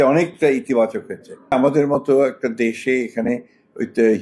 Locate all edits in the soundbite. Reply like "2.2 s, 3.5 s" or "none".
1.5 s